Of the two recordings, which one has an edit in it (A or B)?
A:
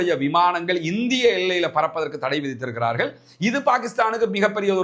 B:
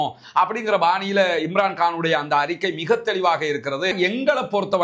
B